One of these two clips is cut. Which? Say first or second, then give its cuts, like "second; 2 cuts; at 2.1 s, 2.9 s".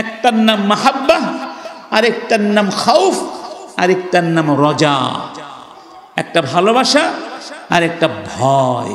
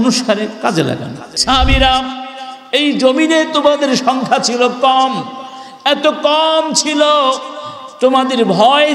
second; 1 cut; at 1.3 s